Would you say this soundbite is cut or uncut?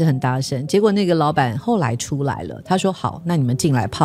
uncut